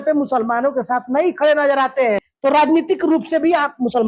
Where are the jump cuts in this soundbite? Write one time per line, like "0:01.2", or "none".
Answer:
0:02.3

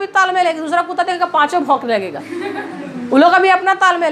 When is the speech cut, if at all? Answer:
none

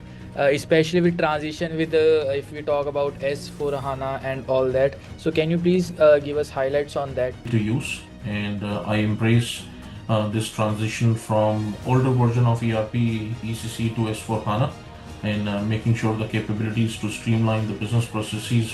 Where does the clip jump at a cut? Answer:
0:07.5

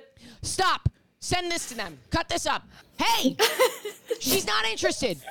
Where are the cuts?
0:02.7

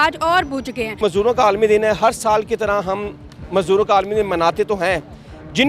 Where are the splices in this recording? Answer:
0:01.0

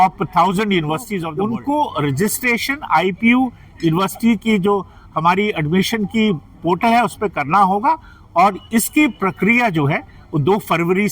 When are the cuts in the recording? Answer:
0:01.2

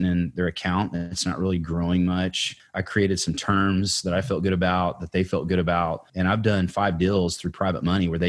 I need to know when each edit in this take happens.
0:02.5
0:06.0

